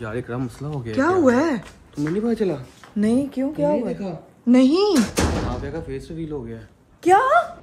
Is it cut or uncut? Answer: uncut